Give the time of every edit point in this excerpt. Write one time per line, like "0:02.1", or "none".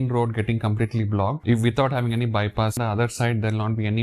0:01.4
0:02.8